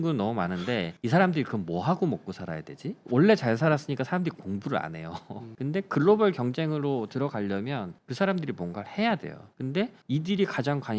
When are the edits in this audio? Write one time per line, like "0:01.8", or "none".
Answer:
0:05.5
0:09.4